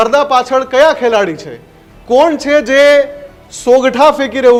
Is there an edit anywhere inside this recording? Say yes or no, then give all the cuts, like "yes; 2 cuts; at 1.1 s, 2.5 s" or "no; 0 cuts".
no; 0 cuts